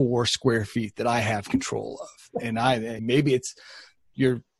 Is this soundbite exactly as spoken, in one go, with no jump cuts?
no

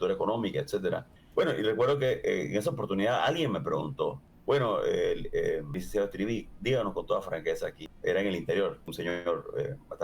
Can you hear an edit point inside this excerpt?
yes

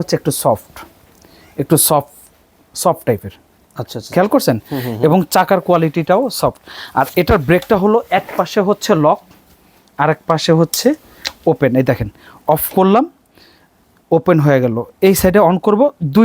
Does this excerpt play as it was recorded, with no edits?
yes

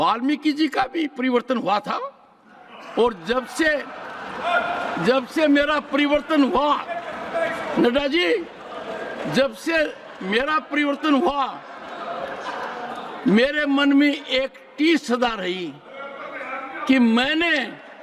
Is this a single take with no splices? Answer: yes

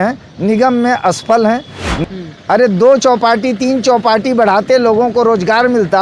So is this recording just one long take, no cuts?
no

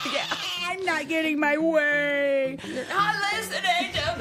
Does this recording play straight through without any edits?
yes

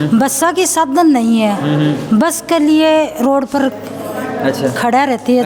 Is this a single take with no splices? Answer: yes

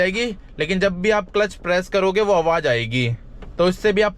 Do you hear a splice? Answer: no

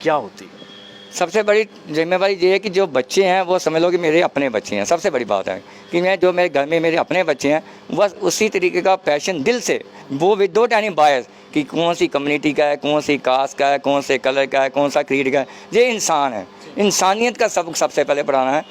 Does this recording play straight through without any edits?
yes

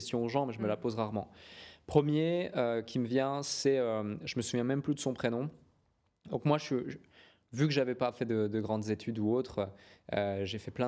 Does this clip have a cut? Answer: no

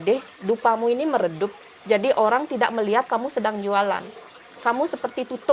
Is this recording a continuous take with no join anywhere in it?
yes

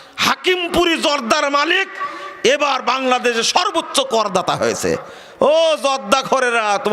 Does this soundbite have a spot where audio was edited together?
no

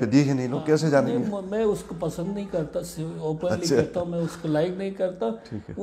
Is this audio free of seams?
yes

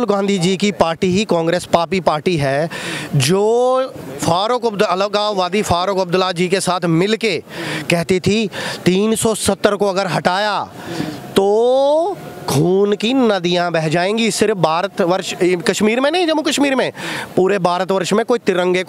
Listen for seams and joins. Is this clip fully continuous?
yes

